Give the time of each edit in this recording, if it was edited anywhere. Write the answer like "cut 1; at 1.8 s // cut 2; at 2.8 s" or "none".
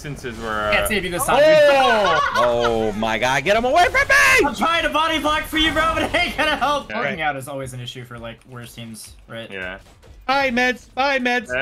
cut 1; at 6.9 s